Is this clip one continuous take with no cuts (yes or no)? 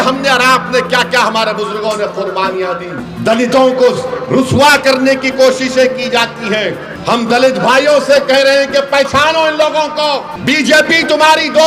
no